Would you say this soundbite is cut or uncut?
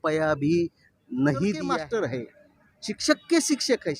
cut